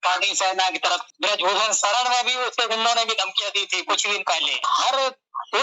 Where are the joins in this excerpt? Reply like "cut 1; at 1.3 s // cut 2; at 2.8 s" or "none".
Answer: cut 1; at 1.0 s // cut 2; at 4.6 s